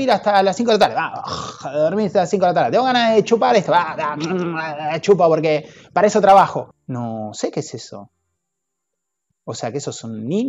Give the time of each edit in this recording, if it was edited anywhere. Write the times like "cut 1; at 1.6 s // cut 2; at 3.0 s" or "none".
cut 1; at 6.8 s